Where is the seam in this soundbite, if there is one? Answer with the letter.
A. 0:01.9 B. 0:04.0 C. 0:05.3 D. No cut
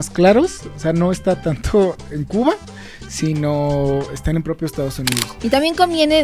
C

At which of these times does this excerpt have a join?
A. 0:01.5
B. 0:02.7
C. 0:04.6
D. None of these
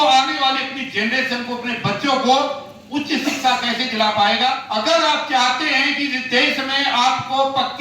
C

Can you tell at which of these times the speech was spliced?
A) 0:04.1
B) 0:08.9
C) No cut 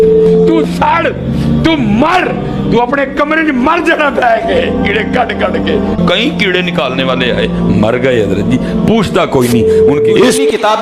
C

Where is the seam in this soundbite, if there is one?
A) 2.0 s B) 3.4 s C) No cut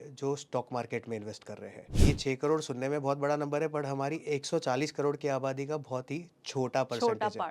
A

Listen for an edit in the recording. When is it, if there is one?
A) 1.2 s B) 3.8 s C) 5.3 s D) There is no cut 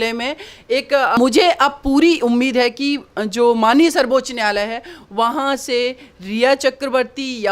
A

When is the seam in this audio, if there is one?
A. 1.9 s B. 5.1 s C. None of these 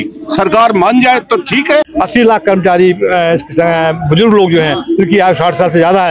A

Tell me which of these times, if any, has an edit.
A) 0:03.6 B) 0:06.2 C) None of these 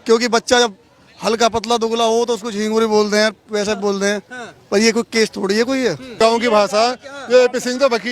B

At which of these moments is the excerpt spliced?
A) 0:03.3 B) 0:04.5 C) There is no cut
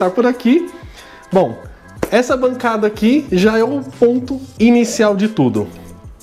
C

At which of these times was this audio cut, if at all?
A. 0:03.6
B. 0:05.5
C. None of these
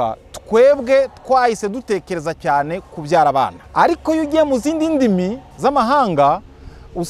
A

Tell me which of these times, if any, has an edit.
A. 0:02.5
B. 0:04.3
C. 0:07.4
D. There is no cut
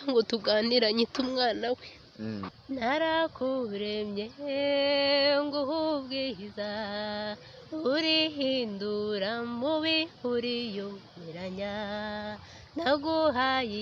A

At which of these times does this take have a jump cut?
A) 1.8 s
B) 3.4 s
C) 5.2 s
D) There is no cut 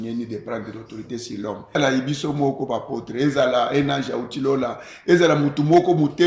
A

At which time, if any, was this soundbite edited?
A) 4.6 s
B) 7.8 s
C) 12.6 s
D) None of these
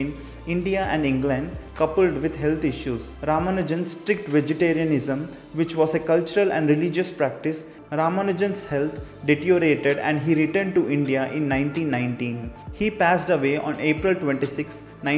B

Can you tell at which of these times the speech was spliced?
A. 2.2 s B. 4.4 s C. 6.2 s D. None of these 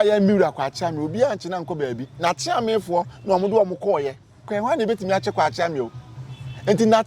B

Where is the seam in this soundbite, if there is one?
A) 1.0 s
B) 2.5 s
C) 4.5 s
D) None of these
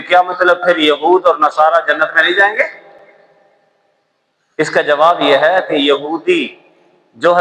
D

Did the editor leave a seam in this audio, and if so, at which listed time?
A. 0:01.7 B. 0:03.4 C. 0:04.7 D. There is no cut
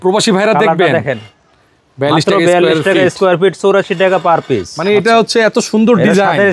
C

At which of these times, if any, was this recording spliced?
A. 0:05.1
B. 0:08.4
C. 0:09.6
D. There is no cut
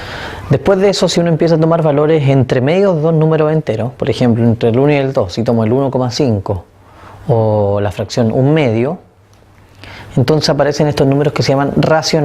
C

